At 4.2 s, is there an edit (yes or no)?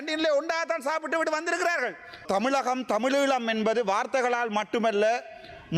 no